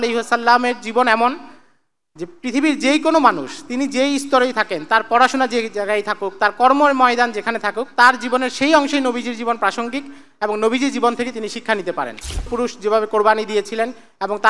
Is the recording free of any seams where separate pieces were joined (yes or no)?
no